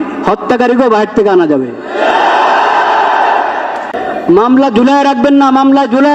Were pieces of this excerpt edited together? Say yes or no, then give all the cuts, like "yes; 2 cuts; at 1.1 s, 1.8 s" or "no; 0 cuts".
yes; 1 cut; at 4.0 s